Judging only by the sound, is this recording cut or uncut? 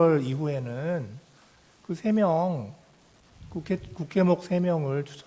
uncut